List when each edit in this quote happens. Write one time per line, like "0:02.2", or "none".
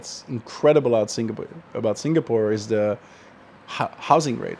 none